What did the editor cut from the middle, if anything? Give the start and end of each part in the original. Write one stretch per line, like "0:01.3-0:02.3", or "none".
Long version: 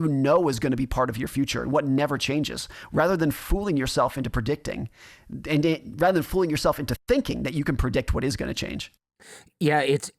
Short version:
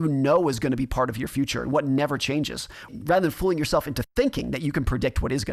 0:02.9-0:05.8